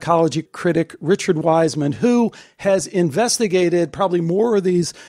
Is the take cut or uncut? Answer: uncut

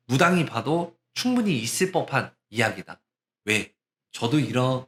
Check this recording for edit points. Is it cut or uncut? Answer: uncut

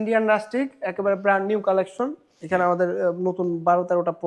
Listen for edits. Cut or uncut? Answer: uncut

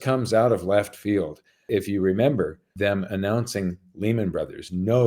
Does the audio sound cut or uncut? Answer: cut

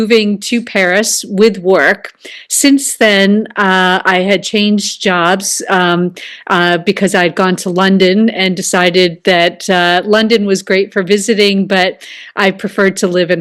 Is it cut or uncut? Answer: uncut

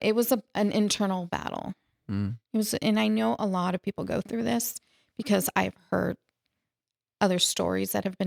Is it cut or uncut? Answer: uncut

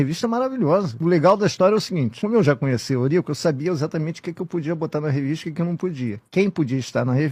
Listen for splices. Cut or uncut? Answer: uncut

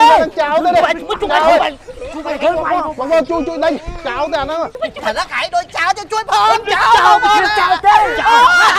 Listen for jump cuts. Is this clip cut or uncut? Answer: cut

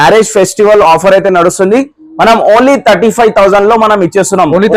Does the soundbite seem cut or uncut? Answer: uncut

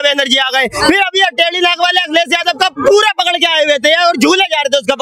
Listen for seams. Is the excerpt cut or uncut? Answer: uncut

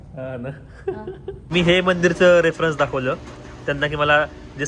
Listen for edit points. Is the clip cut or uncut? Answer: cut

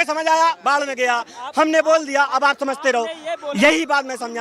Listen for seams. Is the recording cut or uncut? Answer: uncut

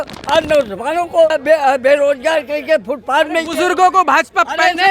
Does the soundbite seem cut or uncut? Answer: cut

